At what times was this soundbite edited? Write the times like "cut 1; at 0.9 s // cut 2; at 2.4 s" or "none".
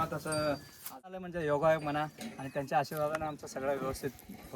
cut 1; at 1.1 s